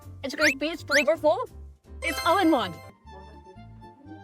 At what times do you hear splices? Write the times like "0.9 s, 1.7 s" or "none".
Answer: 2.8 s